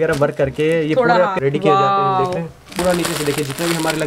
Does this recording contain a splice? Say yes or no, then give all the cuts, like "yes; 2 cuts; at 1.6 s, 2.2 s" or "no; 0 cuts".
yes; 2 cuts; at 1.3 s, 2.7 s